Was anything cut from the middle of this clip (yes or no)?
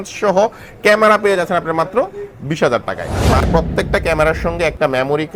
yes